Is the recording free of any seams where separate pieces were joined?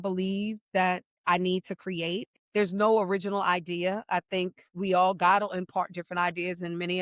no; 2 cuts; at 1.1 s, 2.3 s

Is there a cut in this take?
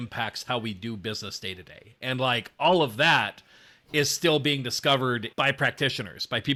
no; 0 cuts

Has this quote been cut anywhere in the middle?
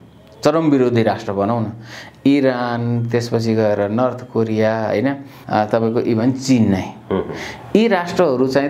yes; 1 cut; at 5.4 s

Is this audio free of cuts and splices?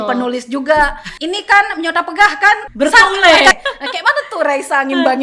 no; 3 cuts; at 1.1 s, 2.7 s, 3.5 s

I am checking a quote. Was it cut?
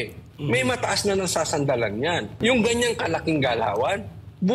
yes; 1 cut; at 2.3 s

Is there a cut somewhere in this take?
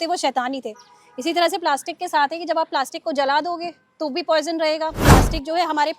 yes; 1 cut; at 5.0 s

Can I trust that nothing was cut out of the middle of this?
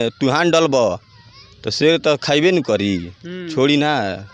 yes; 0 cuts

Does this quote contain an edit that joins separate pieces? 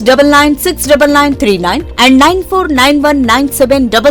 no; 0 cuts

